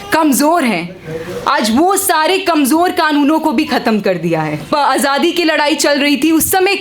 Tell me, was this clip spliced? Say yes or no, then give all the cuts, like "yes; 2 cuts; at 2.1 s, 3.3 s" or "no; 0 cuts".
yes; 1 cut; at 4.7 s